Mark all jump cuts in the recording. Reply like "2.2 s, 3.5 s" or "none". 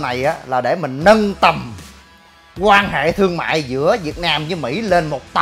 none

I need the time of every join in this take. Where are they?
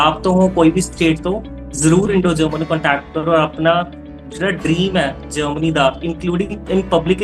none

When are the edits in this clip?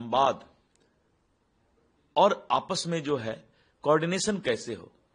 none

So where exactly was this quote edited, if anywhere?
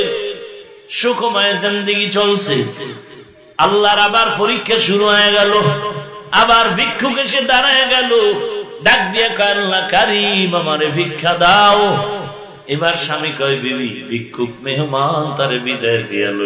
none

